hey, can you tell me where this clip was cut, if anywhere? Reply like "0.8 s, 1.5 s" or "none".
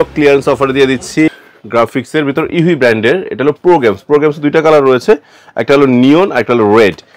1.3 s

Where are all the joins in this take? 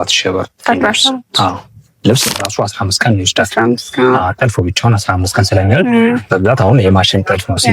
2.3 s

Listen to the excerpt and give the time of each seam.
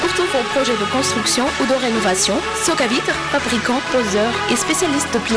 none

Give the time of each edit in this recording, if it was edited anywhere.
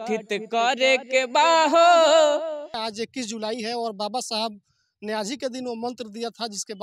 2.8 s

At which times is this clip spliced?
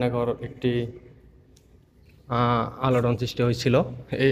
none

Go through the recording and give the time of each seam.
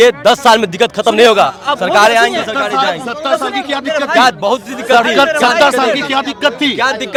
none

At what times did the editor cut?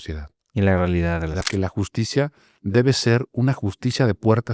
1.4 s

